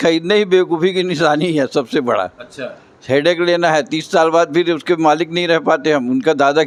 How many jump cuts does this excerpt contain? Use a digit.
0